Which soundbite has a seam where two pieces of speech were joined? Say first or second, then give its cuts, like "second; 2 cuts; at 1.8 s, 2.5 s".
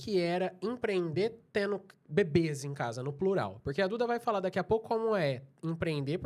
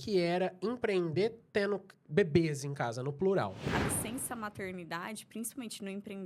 second; 1 cut; at 3.6 s